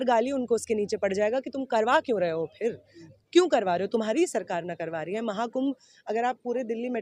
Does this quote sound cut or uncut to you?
uncut